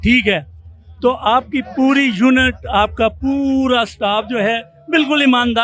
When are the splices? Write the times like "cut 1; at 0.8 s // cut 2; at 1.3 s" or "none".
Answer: none